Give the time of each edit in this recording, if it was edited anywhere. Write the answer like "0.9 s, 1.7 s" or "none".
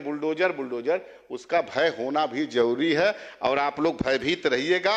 none